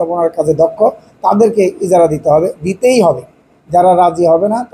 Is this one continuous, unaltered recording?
yes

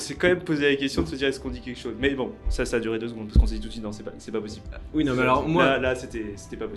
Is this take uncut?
no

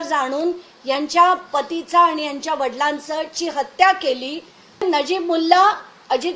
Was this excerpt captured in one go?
no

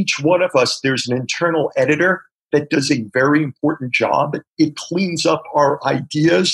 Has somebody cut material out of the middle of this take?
no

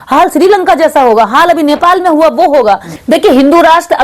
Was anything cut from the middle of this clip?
yes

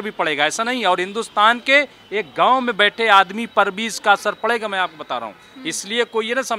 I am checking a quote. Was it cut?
no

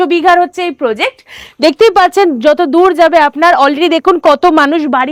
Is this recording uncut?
yes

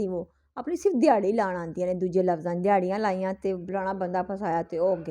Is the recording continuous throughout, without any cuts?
yes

